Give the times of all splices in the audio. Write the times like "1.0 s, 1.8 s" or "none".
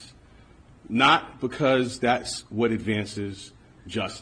3.1 s